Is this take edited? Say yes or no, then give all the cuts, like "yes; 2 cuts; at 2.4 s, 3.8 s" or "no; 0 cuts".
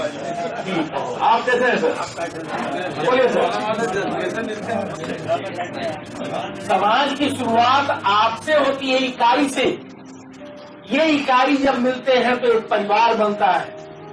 yes; 1 cut; at 6.4 s